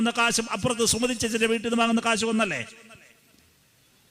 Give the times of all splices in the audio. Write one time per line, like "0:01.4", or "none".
none